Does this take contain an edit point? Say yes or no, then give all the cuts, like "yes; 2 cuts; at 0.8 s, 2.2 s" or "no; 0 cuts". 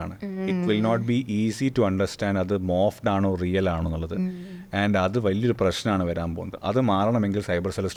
no; 0 cuts